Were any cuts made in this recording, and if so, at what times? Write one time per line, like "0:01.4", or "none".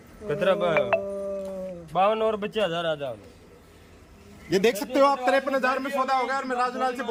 none